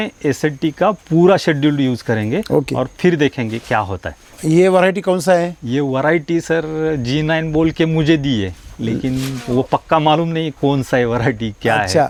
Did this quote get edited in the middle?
no; 0 cuts

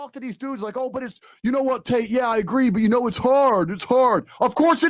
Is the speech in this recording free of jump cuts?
yes; 0 cuts

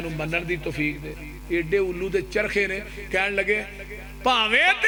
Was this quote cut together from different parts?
no; 0 cuts

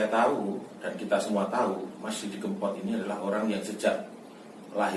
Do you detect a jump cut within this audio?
no; 0 cuts

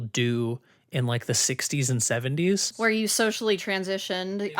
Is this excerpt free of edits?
no; 1 cut; at 2.7 s

